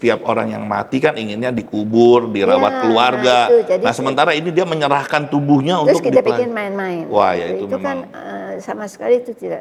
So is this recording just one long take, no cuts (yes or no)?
yes